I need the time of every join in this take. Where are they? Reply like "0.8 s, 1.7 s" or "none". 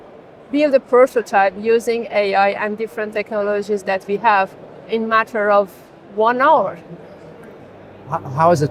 none